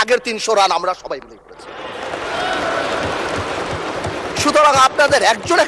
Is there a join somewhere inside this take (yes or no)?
no